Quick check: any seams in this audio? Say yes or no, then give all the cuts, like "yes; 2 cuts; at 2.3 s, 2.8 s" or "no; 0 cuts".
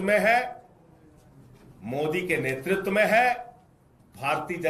no; 0 cuts